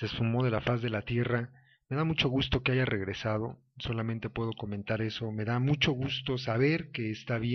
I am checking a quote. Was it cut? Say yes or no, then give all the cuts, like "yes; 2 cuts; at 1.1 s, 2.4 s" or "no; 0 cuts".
yes; 1 cut; at 4.3 s